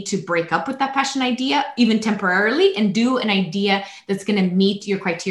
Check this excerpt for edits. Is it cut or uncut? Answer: uncut